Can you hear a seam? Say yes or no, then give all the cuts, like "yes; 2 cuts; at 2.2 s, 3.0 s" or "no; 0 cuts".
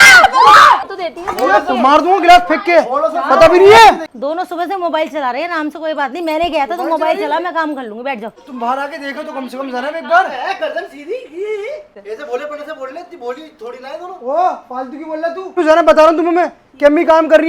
yes; 5 cuts; at 0.9 s, 4.0 s, 8.4 s, 12.0 s, 15.6 s